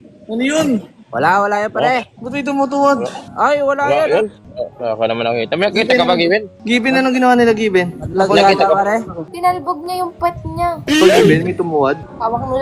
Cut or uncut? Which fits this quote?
cut